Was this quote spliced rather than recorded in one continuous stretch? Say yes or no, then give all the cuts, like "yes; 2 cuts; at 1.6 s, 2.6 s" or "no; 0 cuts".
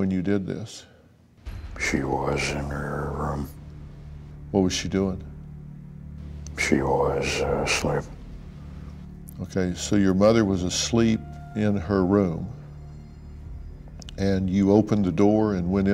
no; 0 cuts